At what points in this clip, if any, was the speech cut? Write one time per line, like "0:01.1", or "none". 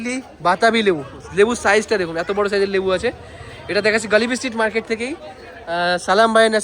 none